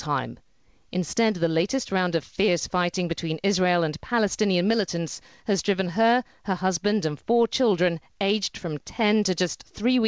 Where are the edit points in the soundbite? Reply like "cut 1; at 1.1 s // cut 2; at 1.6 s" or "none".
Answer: none